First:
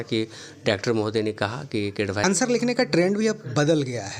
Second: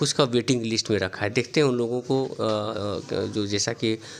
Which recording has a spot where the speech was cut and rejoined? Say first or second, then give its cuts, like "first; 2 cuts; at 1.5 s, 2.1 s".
first; 1 cut; at 2.2 s